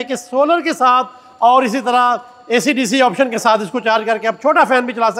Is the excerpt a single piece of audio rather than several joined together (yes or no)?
yes